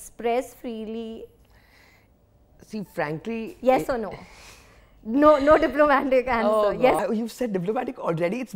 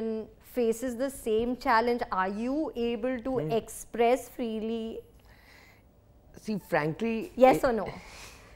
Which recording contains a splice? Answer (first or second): first